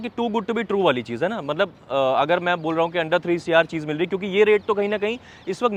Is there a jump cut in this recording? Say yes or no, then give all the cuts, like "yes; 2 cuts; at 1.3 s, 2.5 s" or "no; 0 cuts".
no; 0 cuts